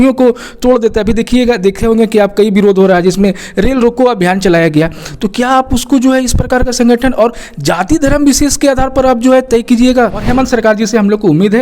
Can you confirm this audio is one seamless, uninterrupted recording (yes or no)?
no